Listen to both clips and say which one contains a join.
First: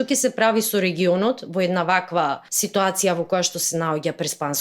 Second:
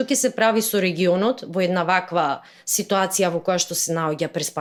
first; 1 cut; at 2.5 s

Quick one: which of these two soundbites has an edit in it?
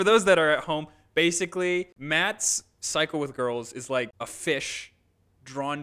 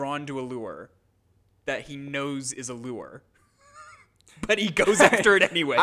first; 2 cuts; at 2.0 s, 4.1 s

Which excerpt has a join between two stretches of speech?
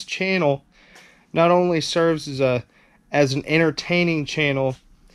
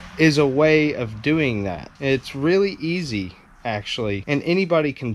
second; 2 cuts; at 1.8 s, 4.2 s

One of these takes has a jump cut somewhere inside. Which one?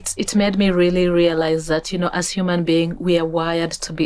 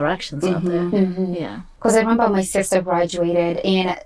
second; 1 cut; at 1.7 s

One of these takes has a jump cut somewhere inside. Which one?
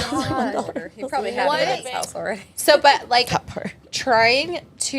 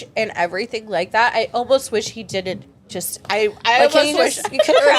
first; 1 cut; at 1.8 s

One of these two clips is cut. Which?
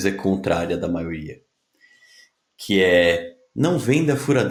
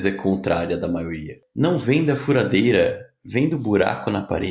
second; 1 cut; at 1.4 s

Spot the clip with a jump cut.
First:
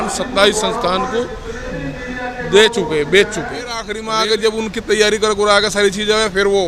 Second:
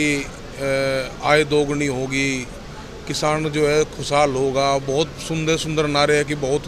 first; 1 cut; at 4.0 s

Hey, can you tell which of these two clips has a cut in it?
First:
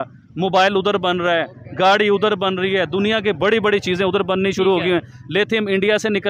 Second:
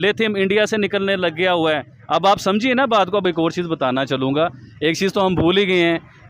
second; 1 cut; at 3.2 s

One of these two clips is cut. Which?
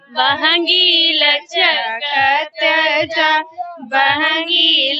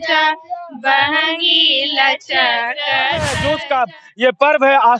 second; 1 cut; at 3.3 s

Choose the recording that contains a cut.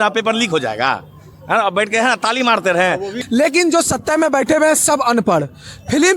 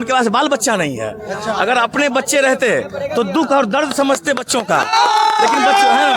first; 1 cut; at 3.1 s

